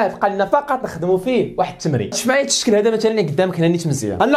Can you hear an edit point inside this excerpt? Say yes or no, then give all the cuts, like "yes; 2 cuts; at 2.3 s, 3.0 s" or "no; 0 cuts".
yes; 1 cut; at 2.1 s